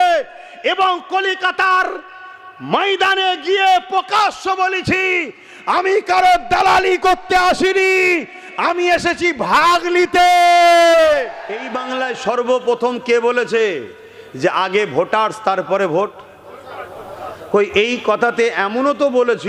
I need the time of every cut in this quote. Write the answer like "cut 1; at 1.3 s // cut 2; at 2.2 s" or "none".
cut 1; at 11.7 s